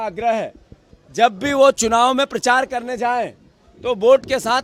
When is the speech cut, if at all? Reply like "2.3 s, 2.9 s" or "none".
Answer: none